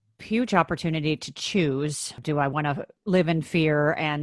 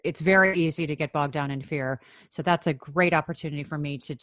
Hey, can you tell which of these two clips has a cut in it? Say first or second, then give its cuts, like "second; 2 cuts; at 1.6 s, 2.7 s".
first; 2 cuts; at 2.2 s, 2.9 s